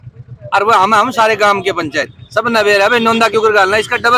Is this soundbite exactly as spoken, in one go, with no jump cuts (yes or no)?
yes